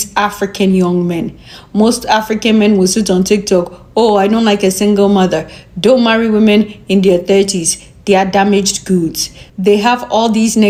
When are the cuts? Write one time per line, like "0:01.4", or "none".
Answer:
none